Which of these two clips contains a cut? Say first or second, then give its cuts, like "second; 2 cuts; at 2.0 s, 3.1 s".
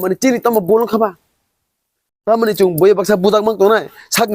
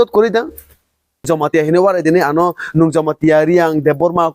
second; 1 cut; at 1.2 s